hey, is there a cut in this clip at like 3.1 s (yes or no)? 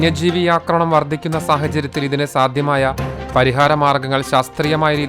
yes